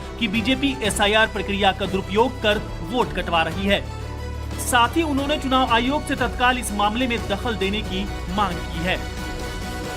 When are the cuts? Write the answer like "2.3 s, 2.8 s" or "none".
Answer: 7.6 s

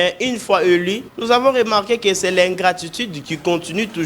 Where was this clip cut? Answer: 1.1 s

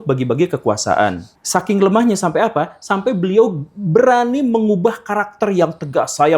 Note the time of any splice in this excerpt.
1.3 s

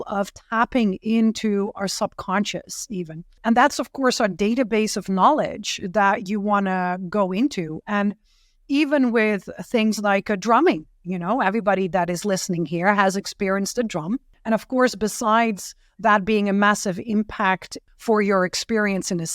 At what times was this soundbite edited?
3.4 s, 14.3 s, 17.7 s

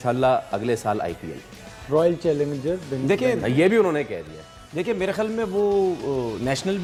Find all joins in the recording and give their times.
none

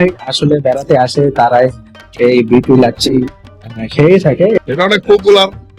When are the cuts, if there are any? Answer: 4.6 s

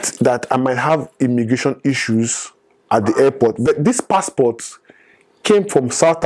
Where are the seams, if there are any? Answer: none

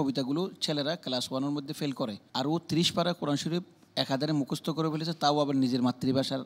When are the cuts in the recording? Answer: 2.2 s

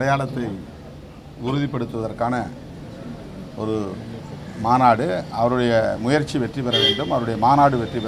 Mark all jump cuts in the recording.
none

